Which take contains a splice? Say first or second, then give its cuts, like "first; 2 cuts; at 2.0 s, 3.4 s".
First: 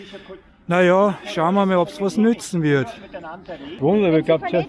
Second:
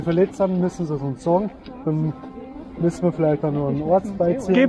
first; 1 cut; at 3.8 s